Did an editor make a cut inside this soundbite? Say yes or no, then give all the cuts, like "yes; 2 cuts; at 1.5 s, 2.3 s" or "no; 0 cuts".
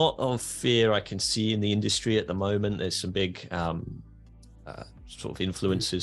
no; 0 cuts